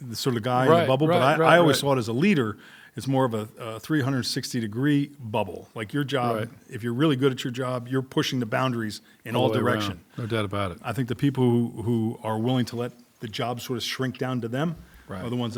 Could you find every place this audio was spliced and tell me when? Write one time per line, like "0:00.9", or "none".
none